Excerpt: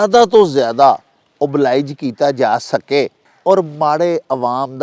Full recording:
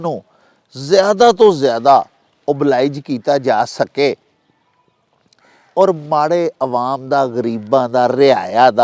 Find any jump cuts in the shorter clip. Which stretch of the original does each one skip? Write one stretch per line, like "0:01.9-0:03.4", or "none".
0:04.3-0:05.6